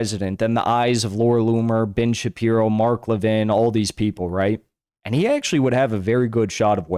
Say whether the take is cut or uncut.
uncut